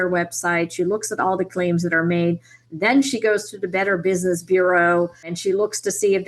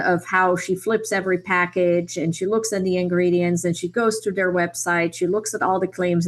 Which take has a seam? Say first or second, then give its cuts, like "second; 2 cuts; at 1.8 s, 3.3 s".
first; 1 cut; at 5.3 s